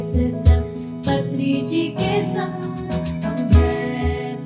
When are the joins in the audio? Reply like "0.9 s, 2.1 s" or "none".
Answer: none

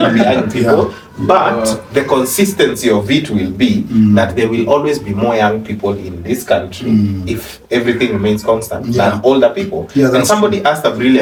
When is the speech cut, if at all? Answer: none

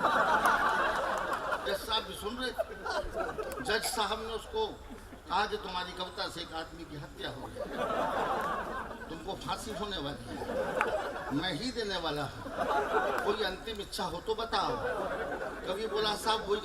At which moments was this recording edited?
1.6 s

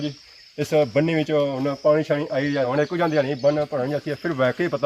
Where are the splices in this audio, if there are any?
2.7 s

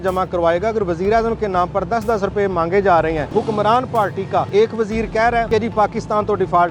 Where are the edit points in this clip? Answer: 3.3 s, 4.5 s, 5.5 s

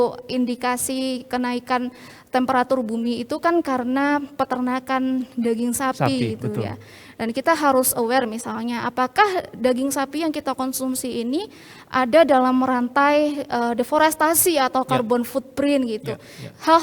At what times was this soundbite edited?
none

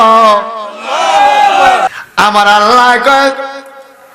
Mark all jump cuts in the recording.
1.9 s

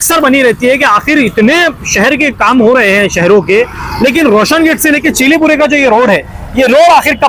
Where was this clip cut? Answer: none

